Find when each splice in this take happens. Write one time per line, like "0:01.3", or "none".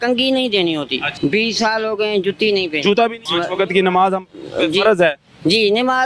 0:01.0
0:03.3